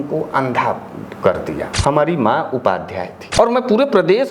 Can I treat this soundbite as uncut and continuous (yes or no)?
no